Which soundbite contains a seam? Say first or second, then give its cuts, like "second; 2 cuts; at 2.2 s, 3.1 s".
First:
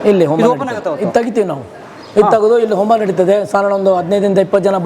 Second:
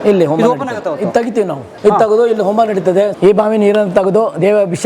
second; 2 cuts; at 1.6 s, 3.1 s